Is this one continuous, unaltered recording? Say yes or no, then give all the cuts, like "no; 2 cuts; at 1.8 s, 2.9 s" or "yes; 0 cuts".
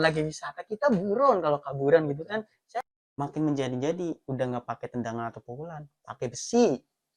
no; 1 cut; at 2.9 s